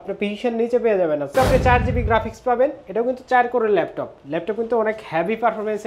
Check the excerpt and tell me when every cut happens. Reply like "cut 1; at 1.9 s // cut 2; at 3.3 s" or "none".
cut 1; at 1.3 s